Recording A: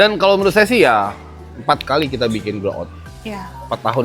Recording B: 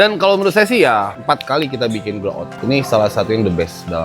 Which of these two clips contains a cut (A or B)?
B